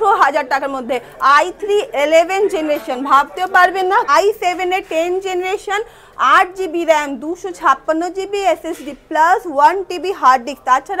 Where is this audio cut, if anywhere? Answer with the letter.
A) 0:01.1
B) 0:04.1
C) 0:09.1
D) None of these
B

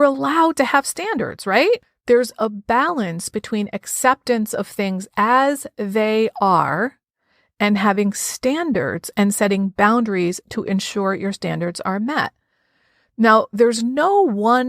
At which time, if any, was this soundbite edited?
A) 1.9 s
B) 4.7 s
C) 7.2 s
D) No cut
A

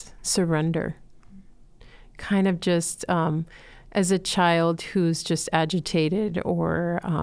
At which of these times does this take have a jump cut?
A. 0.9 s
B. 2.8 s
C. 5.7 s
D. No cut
D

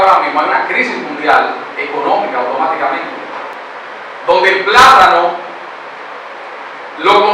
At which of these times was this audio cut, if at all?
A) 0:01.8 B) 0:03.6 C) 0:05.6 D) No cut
B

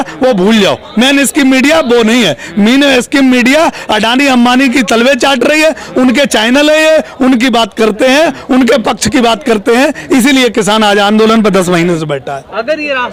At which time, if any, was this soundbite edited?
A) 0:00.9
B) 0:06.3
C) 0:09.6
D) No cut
D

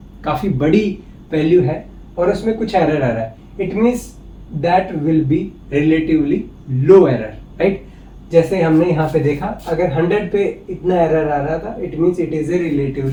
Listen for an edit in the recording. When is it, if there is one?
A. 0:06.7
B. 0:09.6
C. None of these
C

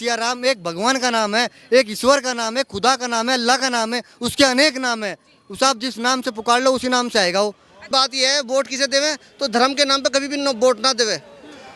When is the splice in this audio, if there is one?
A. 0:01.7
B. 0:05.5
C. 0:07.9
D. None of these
C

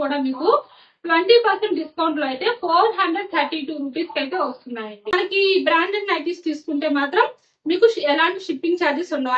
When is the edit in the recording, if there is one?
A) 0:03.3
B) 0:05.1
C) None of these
B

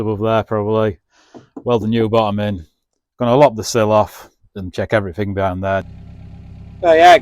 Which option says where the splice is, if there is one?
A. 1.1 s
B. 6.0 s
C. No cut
B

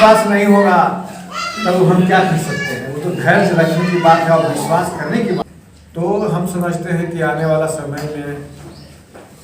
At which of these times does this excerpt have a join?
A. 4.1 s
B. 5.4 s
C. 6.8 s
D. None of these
B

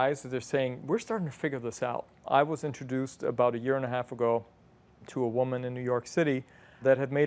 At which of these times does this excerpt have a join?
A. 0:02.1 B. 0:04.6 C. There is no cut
A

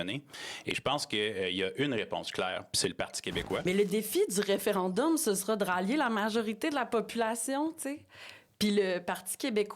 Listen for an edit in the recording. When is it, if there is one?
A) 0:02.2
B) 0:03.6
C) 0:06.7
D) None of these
B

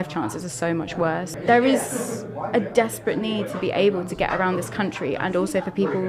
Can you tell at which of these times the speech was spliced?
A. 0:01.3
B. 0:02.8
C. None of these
A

